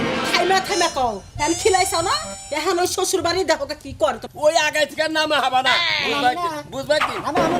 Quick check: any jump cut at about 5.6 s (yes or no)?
no